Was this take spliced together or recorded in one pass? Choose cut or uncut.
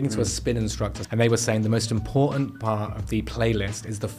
cut